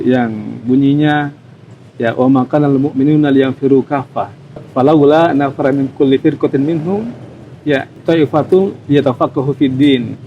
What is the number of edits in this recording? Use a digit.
2